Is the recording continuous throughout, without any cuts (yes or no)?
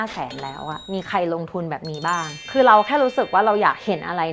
yes